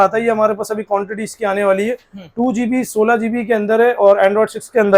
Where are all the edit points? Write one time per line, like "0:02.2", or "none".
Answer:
none